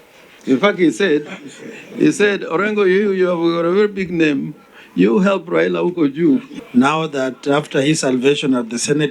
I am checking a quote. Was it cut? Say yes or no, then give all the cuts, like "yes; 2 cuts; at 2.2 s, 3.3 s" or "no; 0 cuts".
yes; 1 cut; at 6.5 s